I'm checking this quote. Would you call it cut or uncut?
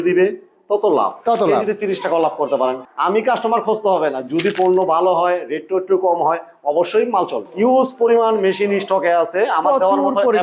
cut